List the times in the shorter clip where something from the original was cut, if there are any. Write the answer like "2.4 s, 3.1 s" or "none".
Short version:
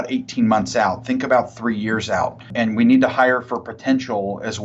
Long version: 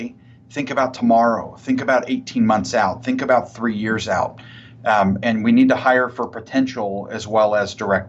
2.5 s